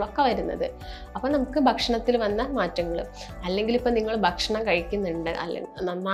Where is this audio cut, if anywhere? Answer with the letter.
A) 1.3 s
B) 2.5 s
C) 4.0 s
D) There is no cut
D